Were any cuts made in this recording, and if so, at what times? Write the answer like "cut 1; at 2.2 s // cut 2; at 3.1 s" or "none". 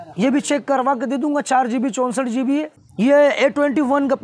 cut 1; at 2.7 s